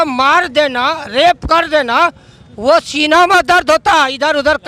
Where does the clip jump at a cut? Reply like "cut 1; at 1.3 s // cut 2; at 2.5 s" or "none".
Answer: none